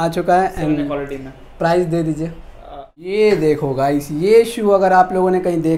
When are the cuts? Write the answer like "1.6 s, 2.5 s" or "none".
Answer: 3.1 s